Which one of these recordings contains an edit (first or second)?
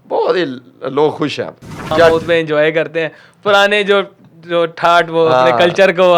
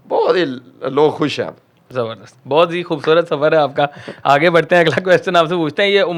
first